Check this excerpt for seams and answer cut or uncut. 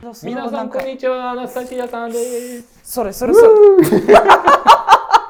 uncut